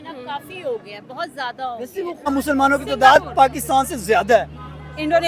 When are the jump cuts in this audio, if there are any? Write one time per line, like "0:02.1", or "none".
0:02.3